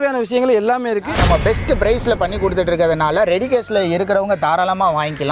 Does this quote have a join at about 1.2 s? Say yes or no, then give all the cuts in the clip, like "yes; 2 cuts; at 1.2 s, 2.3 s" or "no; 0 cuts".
yes; 1 cut; at 1.2 s